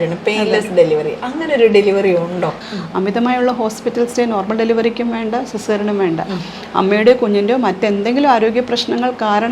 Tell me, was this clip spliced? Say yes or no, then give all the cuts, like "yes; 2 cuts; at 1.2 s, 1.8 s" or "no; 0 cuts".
yes; 1 cut; at 2.6 s